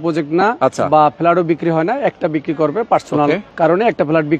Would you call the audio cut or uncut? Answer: cut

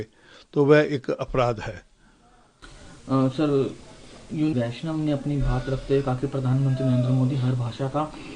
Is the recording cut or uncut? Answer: uncut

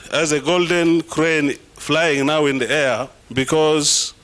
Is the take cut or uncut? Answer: cut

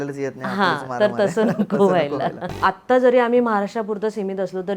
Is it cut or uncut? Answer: cut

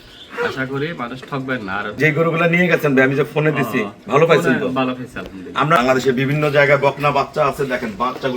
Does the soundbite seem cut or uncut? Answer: cut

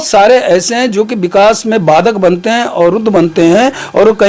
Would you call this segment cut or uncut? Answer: uncut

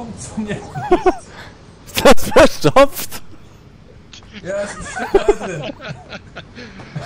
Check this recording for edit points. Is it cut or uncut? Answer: uncut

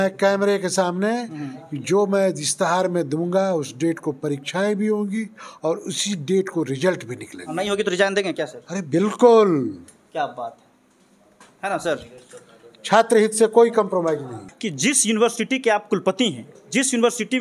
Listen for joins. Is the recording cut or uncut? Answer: cut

